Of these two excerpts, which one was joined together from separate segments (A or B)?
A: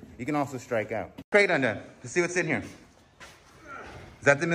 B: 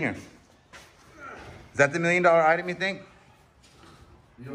A